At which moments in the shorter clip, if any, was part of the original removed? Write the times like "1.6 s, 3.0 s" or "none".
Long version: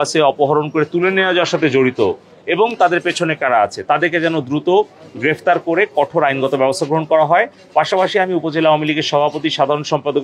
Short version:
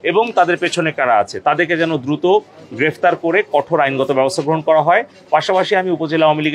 none

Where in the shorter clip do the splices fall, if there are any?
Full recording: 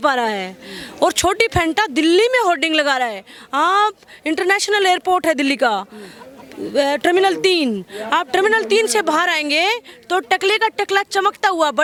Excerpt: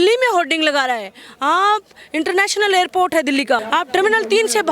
3.6 s

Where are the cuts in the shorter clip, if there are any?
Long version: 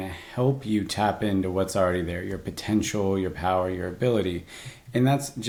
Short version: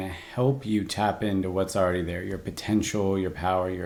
none

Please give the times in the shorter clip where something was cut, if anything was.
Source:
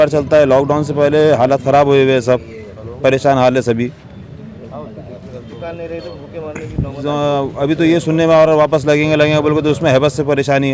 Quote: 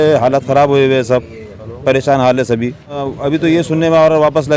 3.1 s

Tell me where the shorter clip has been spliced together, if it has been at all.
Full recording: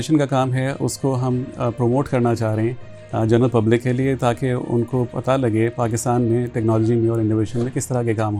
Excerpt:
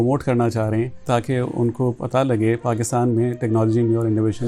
1.0 s

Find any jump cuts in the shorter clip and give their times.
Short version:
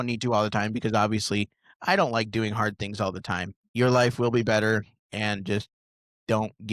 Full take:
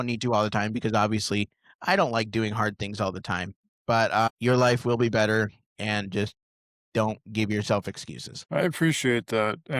3.7 s

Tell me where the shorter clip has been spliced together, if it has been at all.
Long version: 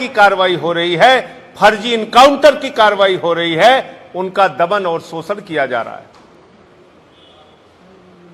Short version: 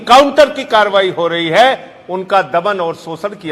none

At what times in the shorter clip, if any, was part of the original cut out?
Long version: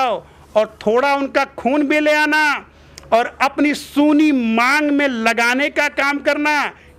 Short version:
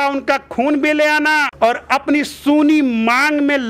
1.5 s

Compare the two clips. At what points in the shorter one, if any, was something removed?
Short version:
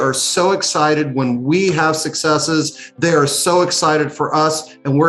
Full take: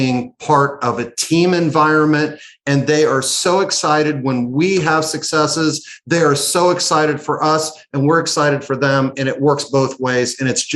none

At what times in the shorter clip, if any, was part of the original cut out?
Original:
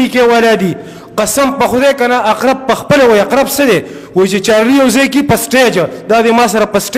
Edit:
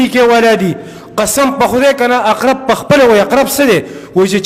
none

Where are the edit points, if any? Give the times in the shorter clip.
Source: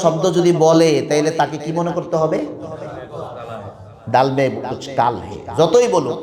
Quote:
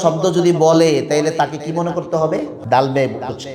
2.6 s

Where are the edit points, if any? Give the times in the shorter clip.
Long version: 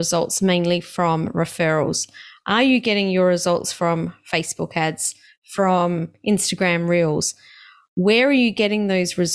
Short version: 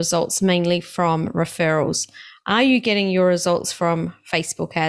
none

